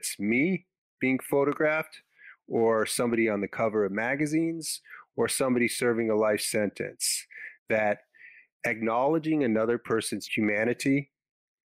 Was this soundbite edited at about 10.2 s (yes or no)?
yes